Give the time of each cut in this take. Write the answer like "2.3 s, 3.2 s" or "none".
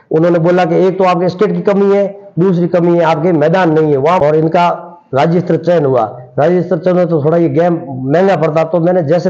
4.2 s